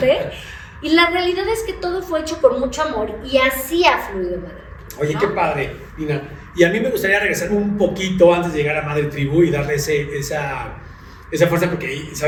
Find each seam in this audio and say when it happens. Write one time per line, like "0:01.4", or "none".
none